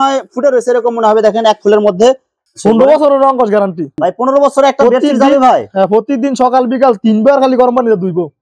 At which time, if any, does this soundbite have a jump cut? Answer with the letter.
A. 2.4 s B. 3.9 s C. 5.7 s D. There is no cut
A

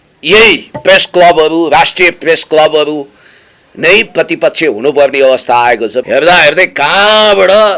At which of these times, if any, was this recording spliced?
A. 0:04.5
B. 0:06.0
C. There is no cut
B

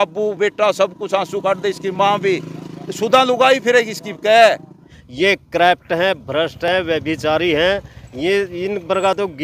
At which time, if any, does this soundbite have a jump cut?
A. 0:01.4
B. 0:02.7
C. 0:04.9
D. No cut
C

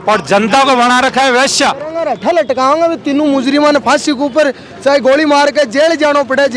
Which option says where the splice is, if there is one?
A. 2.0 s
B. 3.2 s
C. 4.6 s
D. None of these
A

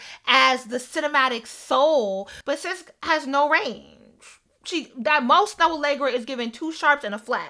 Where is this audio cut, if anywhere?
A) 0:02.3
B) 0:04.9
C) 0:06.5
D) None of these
A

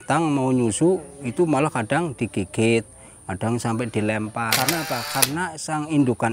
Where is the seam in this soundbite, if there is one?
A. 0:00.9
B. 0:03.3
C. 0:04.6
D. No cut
C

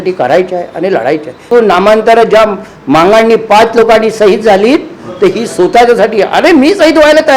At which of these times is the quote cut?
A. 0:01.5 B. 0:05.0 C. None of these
A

